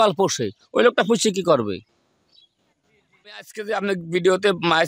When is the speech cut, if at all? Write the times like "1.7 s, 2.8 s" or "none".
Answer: 3.4 s